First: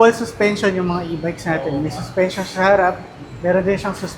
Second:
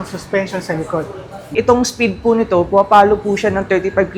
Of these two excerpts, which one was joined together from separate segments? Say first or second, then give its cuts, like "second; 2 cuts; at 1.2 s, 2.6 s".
second; 1 cut; at 1.5 s